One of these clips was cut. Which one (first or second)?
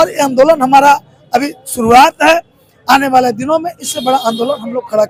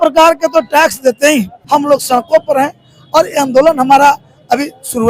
second